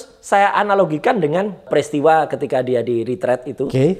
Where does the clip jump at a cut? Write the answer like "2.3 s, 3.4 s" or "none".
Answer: 1.7 s